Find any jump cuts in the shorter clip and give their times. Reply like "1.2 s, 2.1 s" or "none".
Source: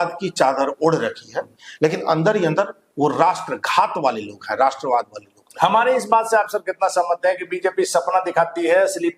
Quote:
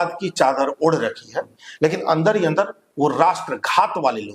none